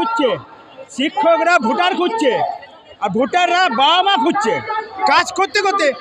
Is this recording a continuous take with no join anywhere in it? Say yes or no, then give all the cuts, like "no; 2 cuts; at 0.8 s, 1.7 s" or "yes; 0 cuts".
no; 1 cut; at 5.0 s